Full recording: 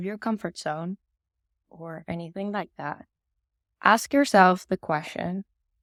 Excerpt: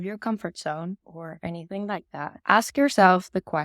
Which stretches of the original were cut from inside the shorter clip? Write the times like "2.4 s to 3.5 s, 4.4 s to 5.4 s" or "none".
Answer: 1.1 s to 1.7 s, 3.0 s to 3.7 s